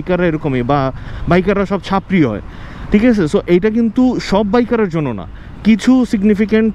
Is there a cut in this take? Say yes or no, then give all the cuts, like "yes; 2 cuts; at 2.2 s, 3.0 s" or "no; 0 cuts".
no; 0 cuts